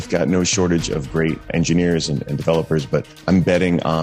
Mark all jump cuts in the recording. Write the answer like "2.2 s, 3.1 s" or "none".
1.5 s, 3.1 s